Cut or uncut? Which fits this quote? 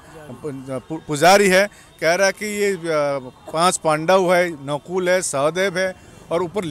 uncut